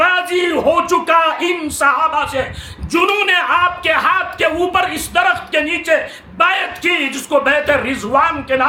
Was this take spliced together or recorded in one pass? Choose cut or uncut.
uncut